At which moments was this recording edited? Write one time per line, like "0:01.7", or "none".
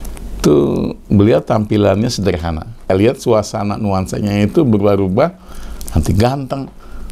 0:02.9